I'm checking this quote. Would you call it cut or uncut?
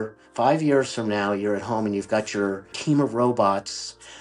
cut